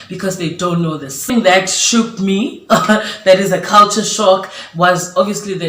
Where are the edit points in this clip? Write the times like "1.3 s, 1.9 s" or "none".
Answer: 1.3 s